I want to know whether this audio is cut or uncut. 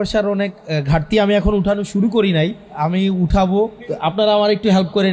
cut